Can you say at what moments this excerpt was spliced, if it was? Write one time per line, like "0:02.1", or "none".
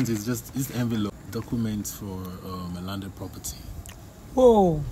0:01.1